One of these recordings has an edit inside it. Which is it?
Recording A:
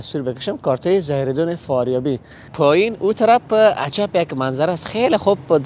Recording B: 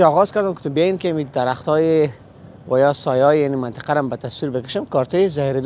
A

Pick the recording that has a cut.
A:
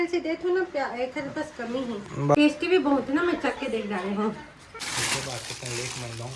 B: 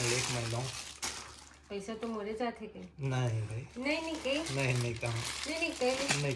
A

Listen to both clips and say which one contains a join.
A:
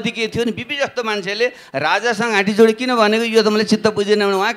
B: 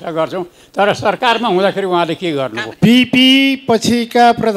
B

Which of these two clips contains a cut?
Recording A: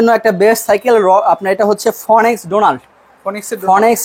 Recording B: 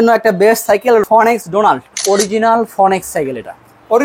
B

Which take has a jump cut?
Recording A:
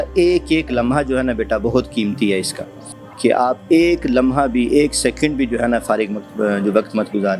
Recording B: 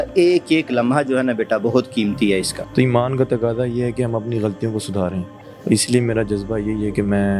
B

